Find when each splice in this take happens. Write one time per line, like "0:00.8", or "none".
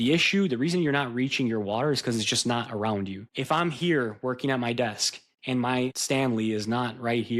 0:03.2
0:06.0